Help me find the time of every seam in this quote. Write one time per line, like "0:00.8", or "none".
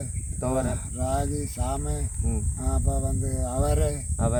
none